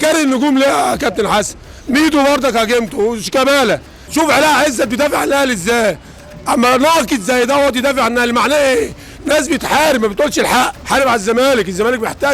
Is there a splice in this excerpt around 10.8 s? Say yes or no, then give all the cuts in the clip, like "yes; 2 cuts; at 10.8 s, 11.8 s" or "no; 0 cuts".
yes; 2 cuts; at 4.0 s, 10.8 s